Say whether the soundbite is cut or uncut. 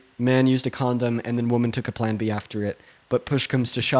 uncut